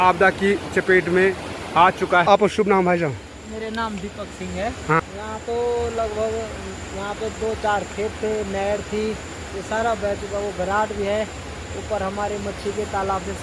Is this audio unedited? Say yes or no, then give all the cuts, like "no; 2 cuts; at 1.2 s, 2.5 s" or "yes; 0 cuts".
no; 2 cuts; at 2.3 s, 5.0 s